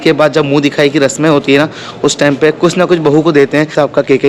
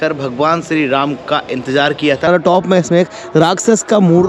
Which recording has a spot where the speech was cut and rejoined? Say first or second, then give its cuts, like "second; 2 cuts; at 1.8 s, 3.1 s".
second; 1 cut; at 2.3 s